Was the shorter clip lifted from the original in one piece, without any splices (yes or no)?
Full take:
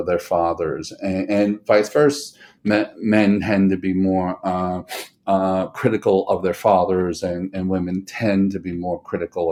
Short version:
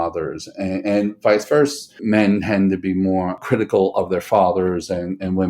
no